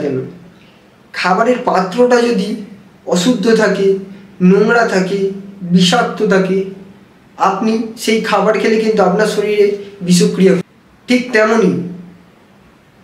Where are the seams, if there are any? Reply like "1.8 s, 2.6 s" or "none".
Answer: 10.6 s